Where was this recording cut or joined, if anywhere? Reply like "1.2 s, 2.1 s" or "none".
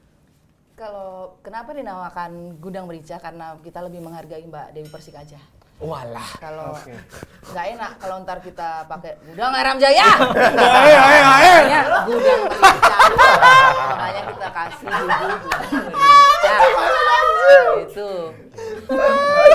none